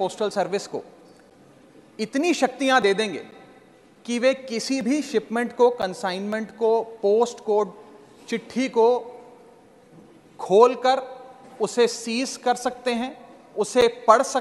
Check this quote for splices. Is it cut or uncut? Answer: uncut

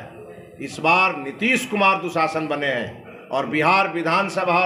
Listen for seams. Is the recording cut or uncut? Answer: uncut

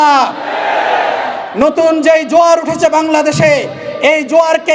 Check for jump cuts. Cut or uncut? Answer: uncut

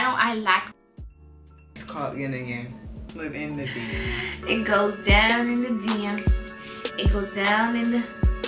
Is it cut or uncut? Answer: cut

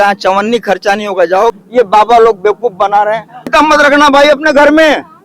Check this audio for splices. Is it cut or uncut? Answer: cut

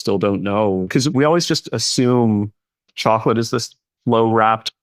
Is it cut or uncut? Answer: cut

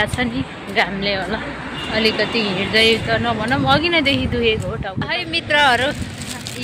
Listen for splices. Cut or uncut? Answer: cut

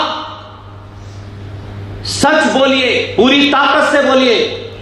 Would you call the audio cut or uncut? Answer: cut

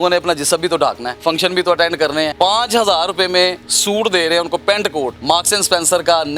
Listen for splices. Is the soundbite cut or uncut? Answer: cut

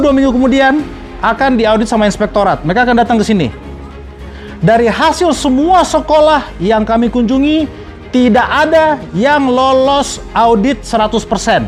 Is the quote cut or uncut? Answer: uncut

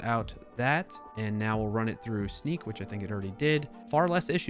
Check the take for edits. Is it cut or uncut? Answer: cut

